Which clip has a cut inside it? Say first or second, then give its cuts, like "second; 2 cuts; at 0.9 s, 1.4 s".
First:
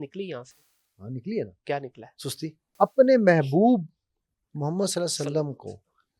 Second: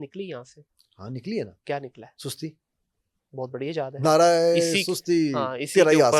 first; 1 cut; at 2.6 s